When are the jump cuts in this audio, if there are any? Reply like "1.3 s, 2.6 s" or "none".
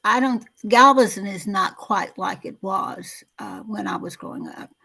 none

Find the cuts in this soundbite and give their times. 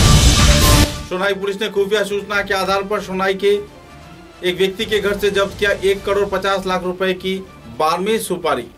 1.0 s

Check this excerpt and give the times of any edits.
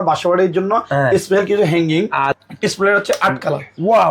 2.4 s

